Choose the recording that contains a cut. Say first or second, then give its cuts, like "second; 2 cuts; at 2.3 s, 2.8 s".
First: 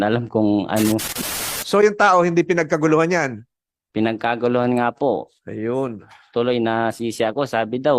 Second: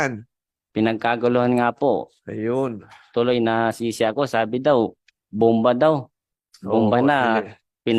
first; 1 cut; at 1.1 s